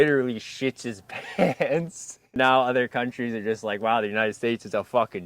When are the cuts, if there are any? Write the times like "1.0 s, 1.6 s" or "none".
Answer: 2.3 s